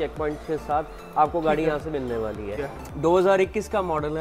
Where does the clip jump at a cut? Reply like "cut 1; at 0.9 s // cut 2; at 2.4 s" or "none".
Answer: cut 1; at 2.6 s